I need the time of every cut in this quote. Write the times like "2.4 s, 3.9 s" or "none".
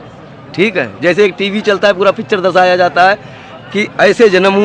none